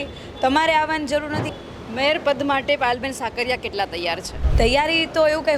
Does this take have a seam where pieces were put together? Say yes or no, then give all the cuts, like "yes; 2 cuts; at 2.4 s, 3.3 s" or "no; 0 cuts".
yes; 2 cuts; at 1.4 s, 4.4 s